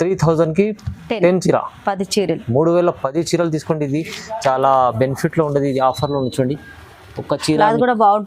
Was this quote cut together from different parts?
no; 0 cuts

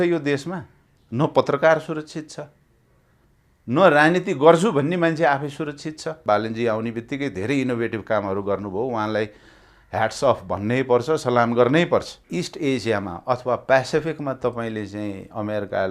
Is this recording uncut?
no; 2 cuts; at 6.2 s, 12.2 s

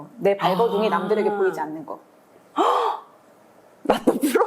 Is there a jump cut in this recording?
no; 0 cuts

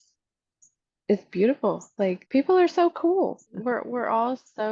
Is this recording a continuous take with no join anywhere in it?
no; 2 cuts; at 2.2 s, 3.5 s

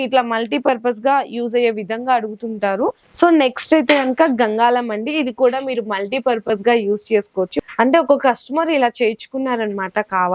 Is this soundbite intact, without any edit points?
no; 2 cuts; at 3.0 s, 7.5 s

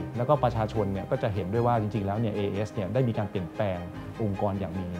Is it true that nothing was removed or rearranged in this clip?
yes; 0 cuts

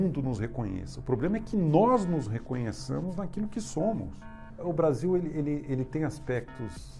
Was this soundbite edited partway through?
yes; 1 cut; at 4.6 s

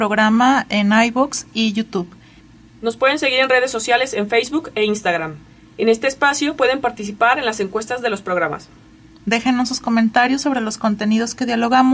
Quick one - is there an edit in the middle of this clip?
no; 0 cuts

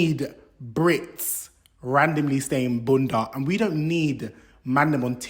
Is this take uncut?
yes; 0 cuts

